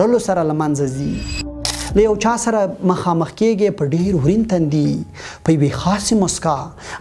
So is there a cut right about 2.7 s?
no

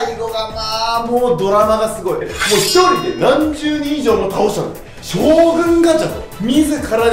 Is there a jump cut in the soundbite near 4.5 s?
no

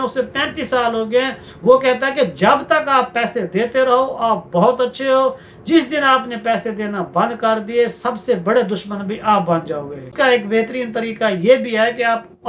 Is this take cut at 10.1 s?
yes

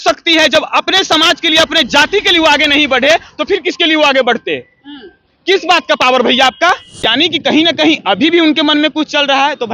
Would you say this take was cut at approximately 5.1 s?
no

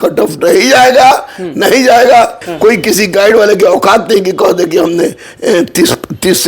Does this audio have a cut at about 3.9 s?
no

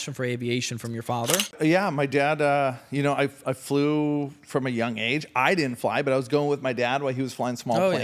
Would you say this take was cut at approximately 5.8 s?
no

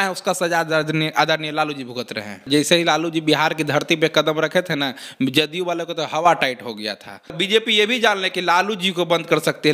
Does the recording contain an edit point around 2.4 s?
yes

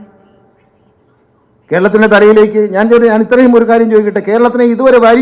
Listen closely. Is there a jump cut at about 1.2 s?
no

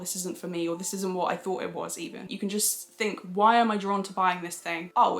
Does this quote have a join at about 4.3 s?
no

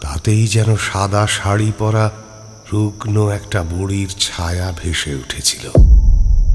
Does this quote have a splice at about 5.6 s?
yes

